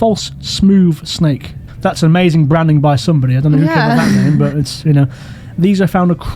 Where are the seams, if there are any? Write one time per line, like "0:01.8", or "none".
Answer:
none